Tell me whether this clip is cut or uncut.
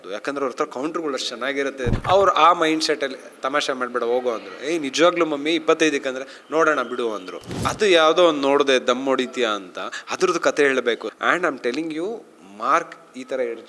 cut